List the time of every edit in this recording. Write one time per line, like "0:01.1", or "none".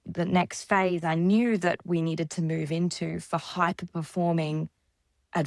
none

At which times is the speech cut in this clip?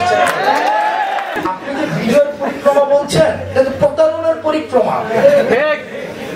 0:01.4

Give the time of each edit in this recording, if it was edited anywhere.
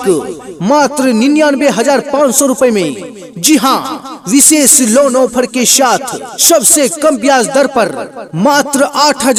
none

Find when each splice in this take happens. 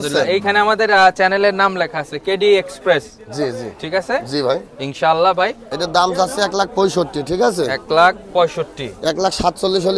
0:05.6

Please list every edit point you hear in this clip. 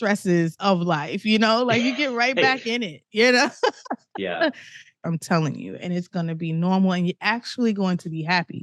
0:04.9

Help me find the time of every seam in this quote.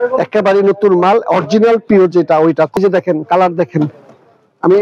0:02.8

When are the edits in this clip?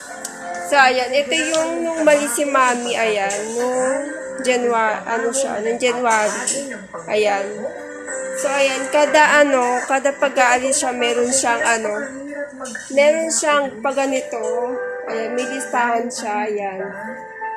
none

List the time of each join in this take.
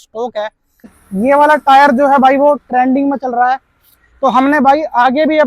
0:01.0

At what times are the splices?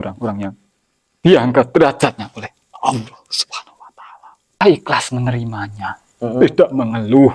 0:04.6

